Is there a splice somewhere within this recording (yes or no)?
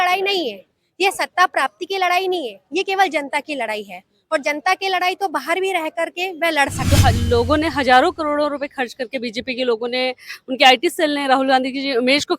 yes